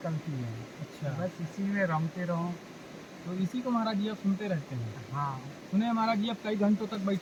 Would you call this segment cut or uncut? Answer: uncut